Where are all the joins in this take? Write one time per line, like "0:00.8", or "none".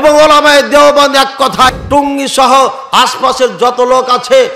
0:01.7